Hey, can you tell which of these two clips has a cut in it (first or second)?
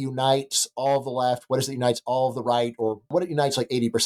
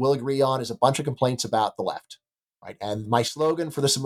first